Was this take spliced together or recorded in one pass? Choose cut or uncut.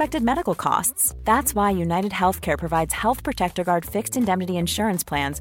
uncut